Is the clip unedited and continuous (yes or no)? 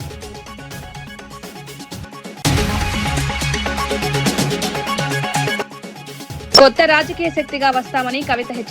no